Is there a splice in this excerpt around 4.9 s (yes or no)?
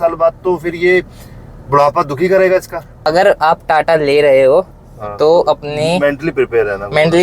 no